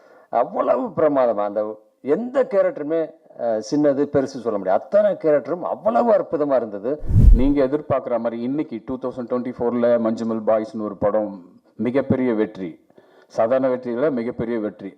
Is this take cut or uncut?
cut